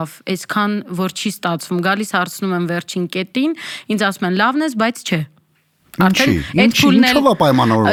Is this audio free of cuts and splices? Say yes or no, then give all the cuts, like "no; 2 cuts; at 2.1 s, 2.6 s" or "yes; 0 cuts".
yes; 0 cuts